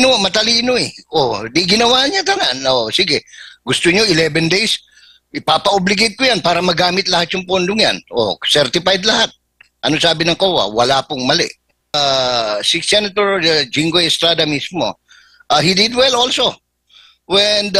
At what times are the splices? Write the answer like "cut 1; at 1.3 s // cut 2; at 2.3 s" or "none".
cut 1; at 12.0 s